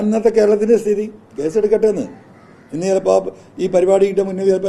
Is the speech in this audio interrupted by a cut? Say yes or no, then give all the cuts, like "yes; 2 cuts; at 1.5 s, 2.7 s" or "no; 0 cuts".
no; 0 cuts